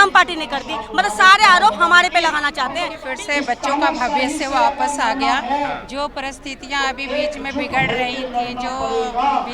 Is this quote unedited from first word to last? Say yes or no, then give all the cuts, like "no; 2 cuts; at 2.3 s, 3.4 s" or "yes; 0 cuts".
no; 1 cut; at 3.0 s